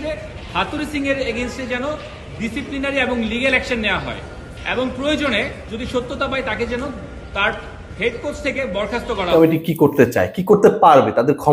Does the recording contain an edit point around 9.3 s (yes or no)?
yes